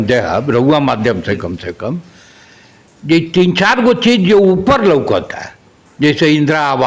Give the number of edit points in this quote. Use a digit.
0